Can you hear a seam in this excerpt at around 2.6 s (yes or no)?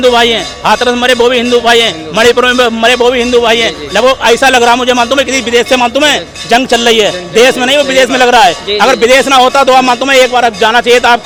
no